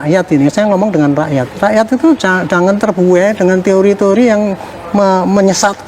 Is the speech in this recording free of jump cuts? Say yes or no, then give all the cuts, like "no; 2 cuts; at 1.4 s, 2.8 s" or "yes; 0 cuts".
yes; 0 cuts